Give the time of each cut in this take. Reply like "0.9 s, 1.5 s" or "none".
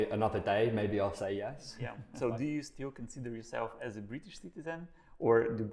2.0 s